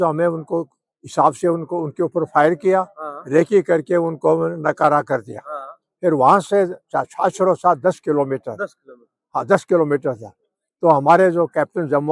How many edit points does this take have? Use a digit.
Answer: 0